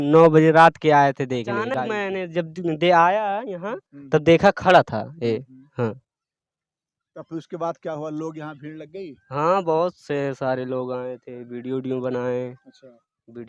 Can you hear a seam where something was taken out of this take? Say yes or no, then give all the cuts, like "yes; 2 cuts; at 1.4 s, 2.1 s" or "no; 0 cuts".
yes; 1 cut; at 1.9 s